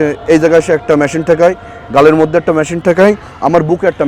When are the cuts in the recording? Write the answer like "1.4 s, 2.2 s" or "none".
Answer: none